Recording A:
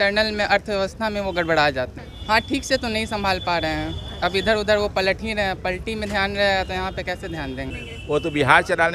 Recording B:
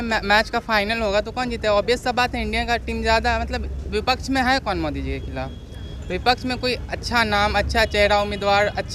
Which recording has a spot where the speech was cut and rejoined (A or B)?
A